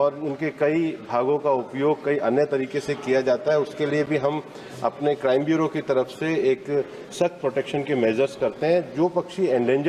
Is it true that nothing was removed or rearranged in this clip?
yes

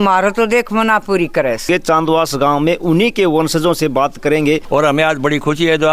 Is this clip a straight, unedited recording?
no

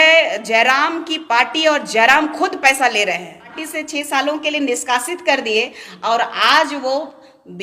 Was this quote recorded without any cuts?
no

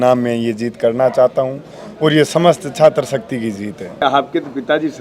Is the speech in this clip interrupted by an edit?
yes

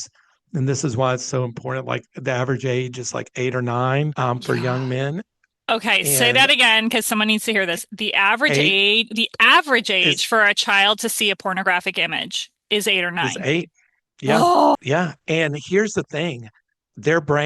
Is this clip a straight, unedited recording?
no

